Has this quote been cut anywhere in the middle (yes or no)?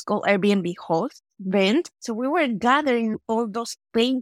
yes